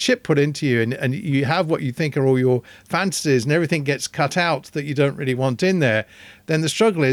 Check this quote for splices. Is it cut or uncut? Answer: uncut